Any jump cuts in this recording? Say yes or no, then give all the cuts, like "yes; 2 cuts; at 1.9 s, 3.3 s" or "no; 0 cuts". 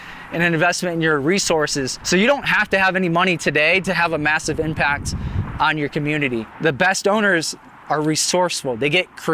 yes; 2 cuts; at 2.0 s, 6.5 s